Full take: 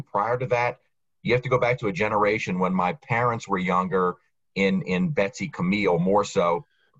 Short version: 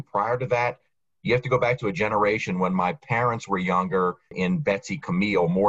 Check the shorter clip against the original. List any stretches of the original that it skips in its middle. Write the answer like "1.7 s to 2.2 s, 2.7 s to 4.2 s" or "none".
4.3 s to 4.8 s